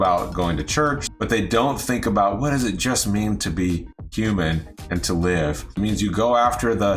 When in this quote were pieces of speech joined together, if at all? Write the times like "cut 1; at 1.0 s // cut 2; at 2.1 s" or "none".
cut 1; at 1.0 s // cut 2; at 5.7 s